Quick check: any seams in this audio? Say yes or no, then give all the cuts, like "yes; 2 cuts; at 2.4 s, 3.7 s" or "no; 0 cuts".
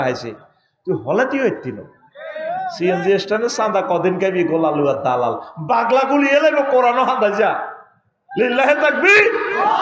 no; 0 cuts